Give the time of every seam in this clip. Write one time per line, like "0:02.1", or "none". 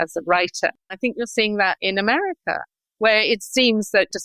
0:00.9